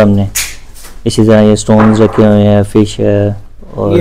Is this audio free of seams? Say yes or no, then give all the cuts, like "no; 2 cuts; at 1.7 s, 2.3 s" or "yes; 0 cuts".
yes; 0 cuts